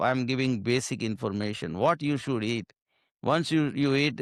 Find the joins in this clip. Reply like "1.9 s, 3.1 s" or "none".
none

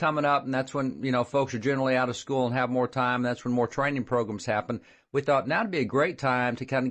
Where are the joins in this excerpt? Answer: 5.4 s

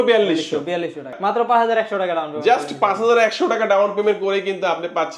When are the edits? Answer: 1.2 s

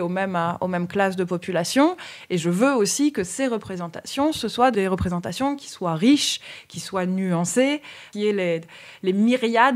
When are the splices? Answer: 4.7 s, 8.1 s

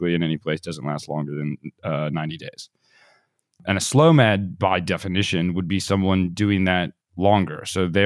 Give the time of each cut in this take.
3.6 s

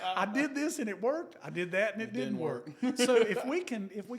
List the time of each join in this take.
none

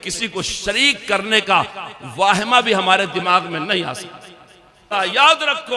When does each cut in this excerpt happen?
4.8 s

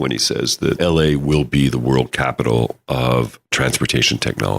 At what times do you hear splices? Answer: 0.8 s, 2.1 s

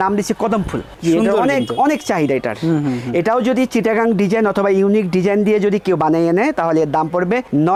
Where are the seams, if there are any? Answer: none

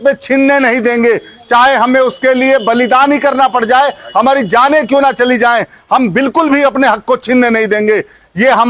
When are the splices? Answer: none

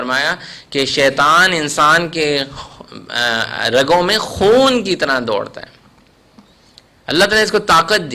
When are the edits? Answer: none

